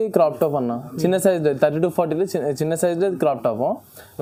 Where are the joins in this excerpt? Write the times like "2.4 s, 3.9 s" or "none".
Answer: none